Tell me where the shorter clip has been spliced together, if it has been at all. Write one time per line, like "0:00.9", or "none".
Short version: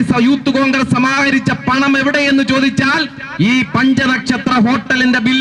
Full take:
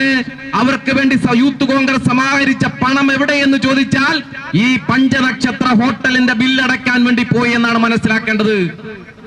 none